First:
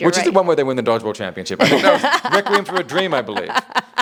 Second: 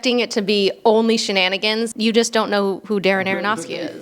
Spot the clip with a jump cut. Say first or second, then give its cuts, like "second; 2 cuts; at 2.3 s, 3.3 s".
second; 1 cut; at 1.9 s